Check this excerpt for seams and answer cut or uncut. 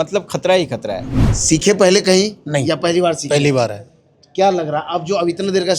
cut